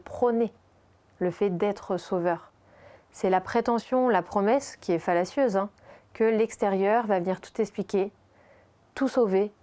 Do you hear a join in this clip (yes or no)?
no